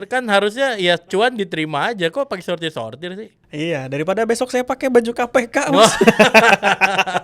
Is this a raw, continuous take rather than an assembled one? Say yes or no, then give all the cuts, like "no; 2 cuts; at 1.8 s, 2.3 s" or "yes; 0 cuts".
yes; 0 cuts